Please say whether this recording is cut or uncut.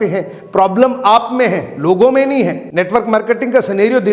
uncut